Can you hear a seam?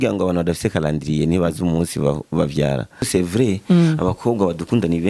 yes; 1 cut; at 3.0 s

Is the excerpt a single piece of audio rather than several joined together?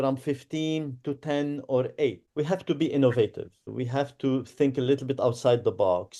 no; 2 cuts; at 2.2 s, 3.7 s

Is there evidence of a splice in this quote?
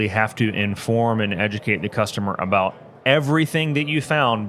no; 0 cuts

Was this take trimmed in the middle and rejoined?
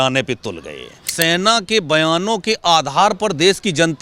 yes; 1 cut; at 1.1 s

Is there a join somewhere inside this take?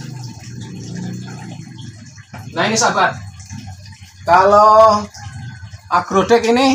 no; 0 cuts

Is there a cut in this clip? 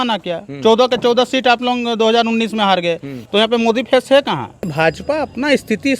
yes; 2 cuts; at 3.1 s, 4.7 s

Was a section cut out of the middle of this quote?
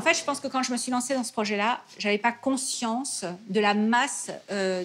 no; 0 cuts

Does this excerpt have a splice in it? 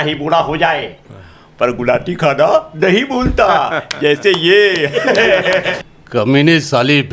yes; 1 cut; at 5.8 s

